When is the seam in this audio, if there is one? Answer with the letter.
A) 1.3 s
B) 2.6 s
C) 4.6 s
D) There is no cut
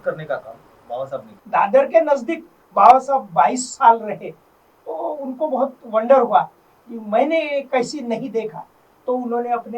A